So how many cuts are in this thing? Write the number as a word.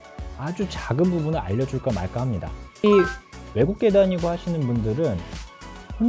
one